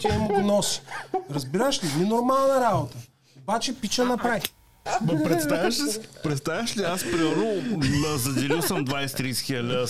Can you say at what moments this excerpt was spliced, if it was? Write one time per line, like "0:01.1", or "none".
0:04.8